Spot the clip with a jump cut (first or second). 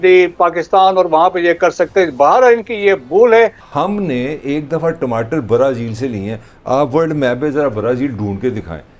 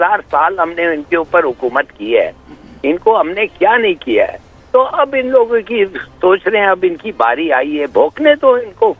first